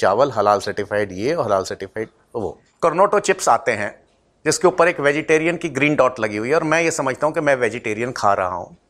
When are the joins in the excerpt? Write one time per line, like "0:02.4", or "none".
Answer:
0:02.6